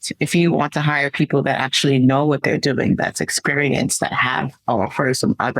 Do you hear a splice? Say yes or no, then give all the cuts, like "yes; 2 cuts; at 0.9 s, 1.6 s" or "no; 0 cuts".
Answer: no; 0 cuts